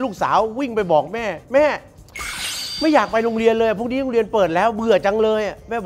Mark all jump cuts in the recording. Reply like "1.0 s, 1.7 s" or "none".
none